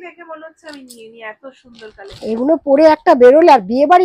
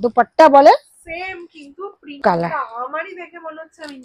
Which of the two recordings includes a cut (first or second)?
second